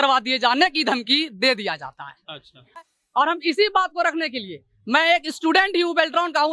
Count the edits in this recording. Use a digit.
1